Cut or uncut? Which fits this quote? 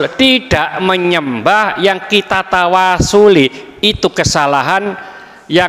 uncut